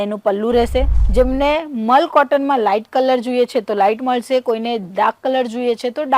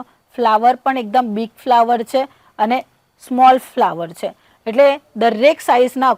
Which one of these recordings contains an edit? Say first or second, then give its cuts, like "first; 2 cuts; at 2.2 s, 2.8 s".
first; 1 cut; at 1.0 s